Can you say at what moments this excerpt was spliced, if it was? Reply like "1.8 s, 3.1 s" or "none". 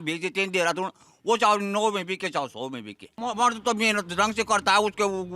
3.1 s